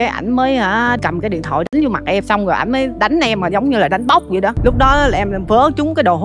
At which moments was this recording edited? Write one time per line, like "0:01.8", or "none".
0:01.0
0:02.2
0:04.6